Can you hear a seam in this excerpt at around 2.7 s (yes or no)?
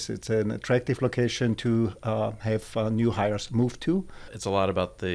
no